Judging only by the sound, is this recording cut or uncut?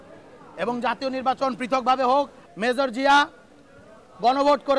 cut